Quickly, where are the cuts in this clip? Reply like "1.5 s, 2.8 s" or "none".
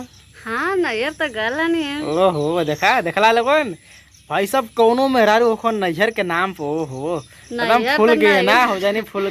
none